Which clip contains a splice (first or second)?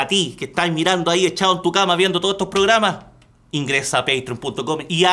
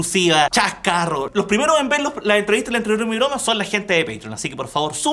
second